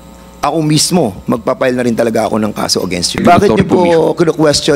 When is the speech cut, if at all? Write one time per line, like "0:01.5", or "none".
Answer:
0:03.2